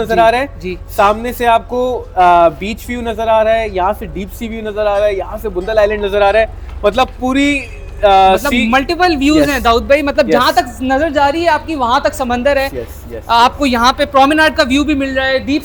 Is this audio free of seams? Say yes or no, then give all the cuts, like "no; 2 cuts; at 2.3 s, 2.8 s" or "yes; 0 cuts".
yes; 0 cuts